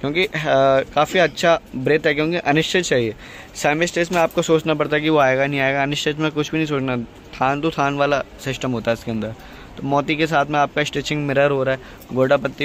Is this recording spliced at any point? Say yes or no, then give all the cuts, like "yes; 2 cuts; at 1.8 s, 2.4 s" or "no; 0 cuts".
no; 0 cuts